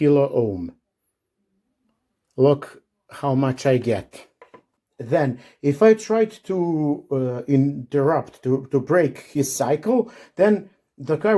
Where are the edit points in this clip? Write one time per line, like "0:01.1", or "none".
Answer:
0:04.7